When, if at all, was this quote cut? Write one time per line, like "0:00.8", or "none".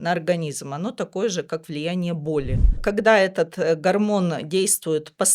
0:02.8